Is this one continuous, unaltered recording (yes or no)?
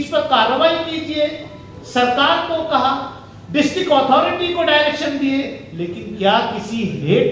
yes